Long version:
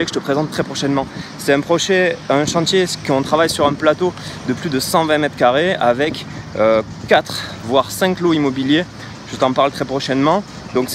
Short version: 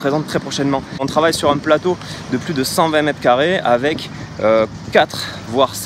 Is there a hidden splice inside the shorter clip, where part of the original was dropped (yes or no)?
yes